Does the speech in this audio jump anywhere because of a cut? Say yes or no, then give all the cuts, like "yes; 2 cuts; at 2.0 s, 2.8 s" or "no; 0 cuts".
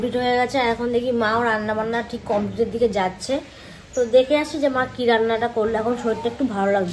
no; 0 cuts